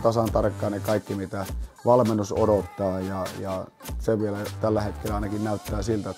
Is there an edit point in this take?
no; 0 cuts

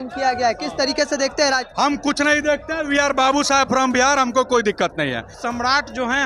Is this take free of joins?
no; 1 cut; at 5.3 s

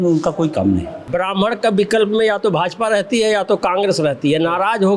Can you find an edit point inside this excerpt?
yes; 1 cut; at 1.0 s

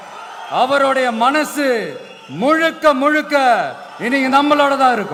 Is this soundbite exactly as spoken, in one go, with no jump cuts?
yes; 0 cuts

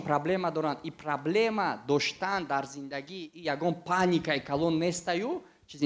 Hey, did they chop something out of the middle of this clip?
no; 0 cuts

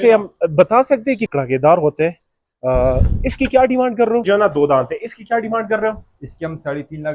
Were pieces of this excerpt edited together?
yes; 2 cuts; at 1.3 s, 4.2 s

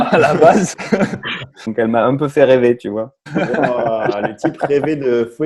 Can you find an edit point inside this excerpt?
yes; 2 cuts; at 1.6 s, 3.2 s

